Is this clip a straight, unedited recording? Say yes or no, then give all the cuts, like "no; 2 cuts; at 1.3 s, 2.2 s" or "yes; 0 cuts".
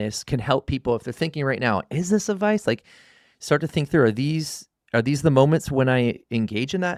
yes; 0 cuts